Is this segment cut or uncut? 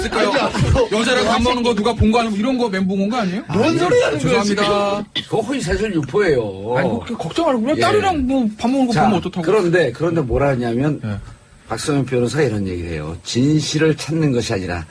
cut